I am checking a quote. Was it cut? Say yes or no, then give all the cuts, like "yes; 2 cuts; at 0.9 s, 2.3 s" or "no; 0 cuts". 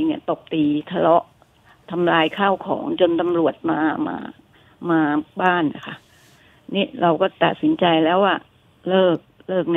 no; 0 cuts